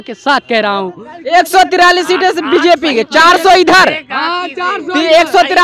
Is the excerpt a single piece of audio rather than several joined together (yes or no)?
yes